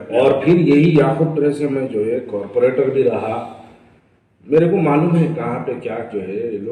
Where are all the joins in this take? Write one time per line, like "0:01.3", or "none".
none